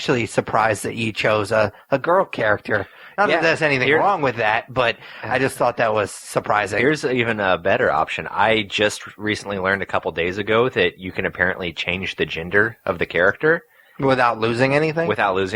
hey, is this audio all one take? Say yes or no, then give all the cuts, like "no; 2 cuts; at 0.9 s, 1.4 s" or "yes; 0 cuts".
yes; 0 cuts